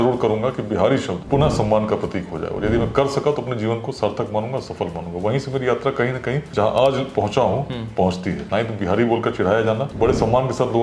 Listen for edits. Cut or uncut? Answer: cut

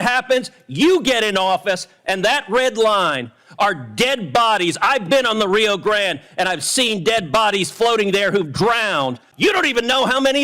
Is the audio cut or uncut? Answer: cut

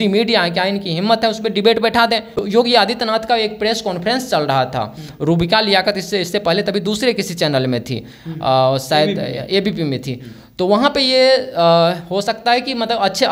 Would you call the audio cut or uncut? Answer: cut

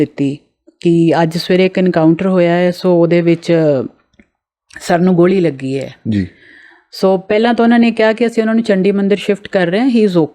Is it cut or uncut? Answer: uncut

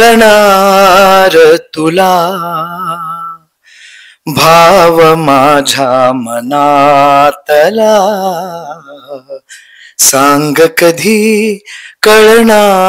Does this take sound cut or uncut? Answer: uncut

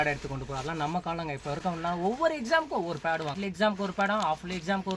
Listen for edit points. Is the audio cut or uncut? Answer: cut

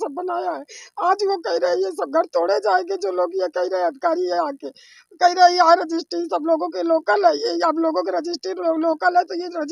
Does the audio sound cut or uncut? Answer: uncut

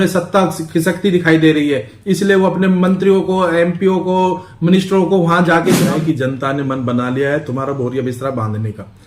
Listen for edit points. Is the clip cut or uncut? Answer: cut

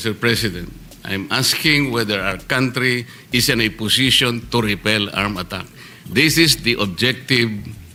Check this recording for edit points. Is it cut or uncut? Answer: uncut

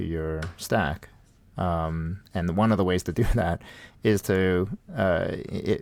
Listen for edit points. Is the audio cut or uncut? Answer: uncut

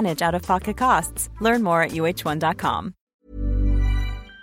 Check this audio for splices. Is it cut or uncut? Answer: cut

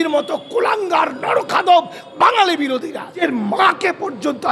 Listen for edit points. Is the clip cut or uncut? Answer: cut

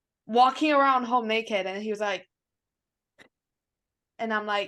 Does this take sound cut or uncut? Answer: uncut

